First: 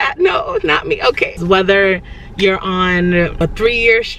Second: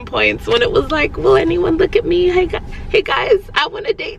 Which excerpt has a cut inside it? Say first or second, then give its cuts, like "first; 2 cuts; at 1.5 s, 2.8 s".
first; 2 cuts; at 1.4 s, 3.4 s